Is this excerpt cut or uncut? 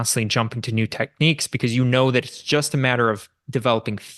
uncut